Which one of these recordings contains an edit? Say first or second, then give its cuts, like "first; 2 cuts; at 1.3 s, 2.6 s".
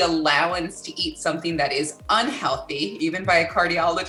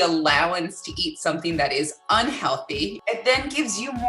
second; 1 cut; at 2.9 s